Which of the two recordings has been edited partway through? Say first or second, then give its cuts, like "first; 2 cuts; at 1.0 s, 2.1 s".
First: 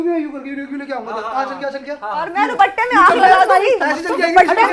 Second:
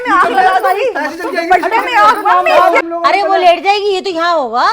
second; 1 cut; at 2.8 s